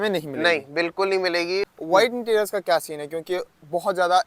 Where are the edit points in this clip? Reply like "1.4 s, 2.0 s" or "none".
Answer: 1.7 s